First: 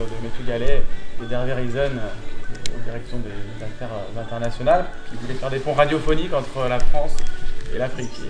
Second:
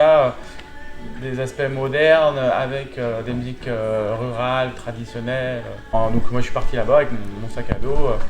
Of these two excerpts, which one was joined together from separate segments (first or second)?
second